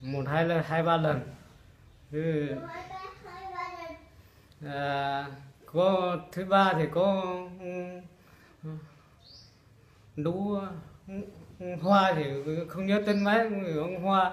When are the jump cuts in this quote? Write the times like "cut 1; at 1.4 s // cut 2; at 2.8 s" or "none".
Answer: cut 1; at 8.5 s